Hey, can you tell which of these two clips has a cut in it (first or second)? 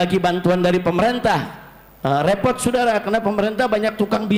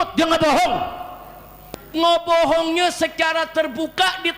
second